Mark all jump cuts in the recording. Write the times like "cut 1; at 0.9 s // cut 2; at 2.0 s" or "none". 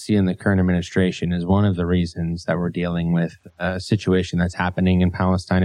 none